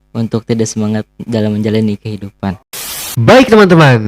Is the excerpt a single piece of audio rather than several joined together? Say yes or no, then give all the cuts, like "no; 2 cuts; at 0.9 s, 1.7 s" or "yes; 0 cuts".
no; 1 cut; at 2.6 s